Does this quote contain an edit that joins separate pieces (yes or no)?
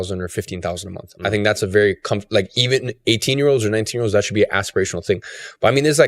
no